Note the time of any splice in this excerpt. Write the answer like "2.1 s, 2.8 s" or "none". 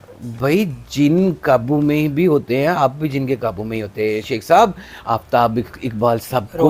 4.9 s